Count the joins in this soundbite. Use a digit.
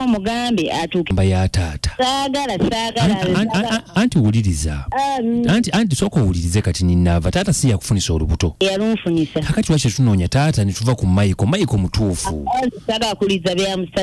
1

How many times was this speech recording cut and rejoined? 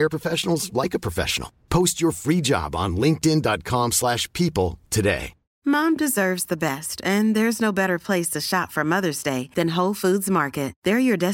1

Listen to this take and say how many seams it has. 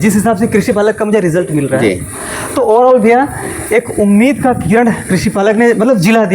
0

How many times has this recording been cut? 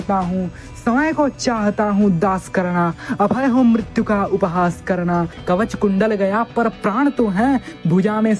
1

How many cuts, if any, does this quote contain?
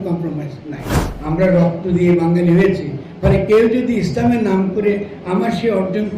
1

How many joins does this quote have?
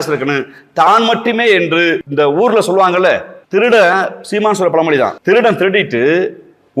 3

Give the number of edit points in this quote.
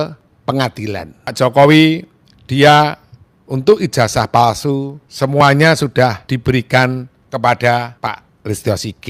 5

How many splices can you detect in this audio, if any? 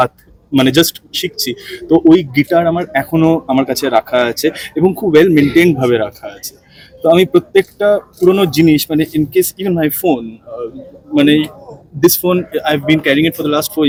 0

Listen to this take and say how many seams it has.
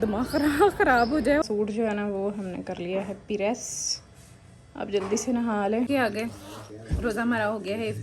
2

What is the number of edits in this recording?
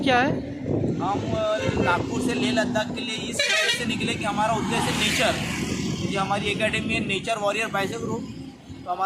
0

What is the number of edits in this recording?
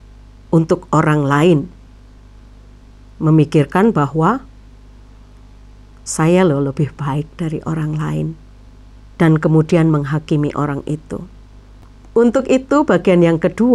0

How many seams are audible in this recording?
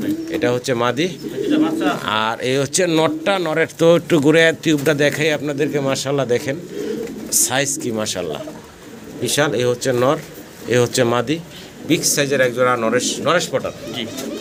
0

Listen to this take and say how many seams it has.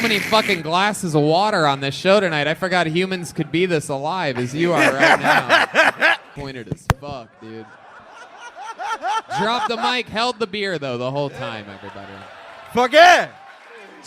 1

